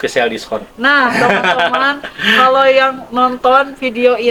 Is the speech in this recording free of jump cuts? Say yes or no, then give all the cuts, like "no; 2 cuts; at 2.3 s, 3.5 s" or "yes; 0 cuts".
yes; 0 cuts